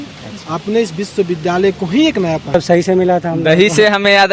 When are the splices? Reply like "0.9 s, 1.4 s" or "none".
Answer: 2.5 s